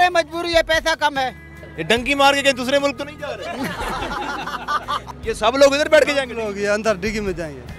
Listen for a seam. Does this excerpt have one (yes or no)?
yes